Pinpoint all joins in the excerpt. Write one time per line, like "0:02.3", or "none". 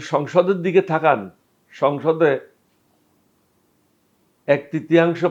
none